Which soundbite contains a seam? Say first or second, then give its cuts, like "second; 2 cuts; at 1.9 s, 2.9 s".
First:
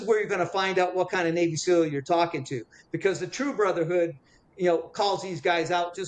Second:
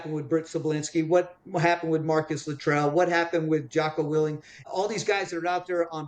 second; 1 cut; at 4.5 s